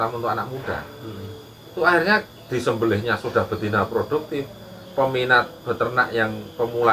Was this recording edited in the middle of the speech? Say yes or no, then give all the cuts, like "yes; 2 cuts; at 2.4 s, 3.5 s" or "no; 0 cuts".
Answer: no; 0 cuts